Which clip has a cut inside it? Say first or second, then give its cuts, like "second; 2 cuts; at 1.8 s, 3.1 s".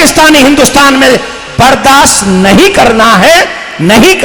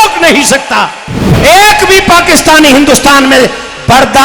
second; 1 cut; at 1.3 s